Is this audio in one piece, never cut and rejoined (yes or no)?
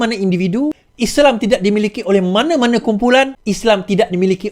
no